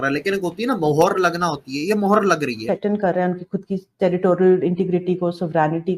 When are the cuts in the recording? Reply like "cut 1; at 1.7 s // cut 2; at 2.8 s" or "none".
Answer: cut 1; at 2.6 s